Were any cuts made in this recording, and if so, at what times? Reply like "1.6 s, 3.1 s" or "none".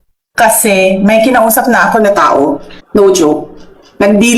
2.7 s